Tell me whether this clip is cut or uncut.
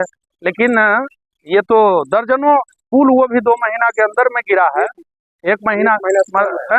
uncut